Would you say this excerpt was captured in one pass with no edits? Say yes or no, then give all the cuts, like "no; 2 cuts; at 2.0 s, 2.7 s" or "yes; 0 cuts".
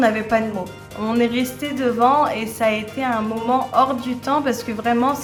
yes; 0 cuts